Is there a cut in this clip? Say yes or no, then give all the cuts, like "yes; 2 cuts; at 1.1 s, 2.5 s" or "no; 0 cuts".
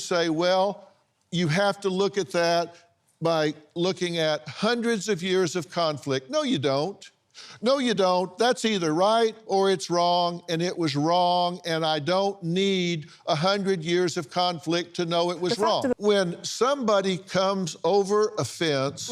yes; 1 cut; at 15.9 s